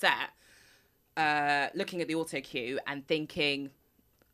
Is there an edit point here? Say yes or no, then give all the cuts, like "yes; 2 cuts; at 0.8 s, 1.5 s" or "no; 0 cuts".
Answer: no; 0 cuts